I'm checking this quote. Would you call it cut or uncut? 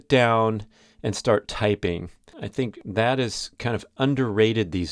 cut